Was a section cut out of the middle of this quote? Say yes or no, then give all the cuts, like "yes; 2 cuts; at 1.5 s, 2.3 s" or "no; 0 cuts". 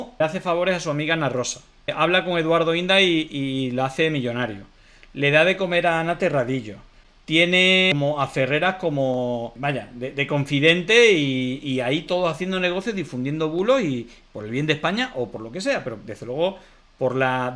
yes; 2 cuts; at 7.9 s, 9.5 s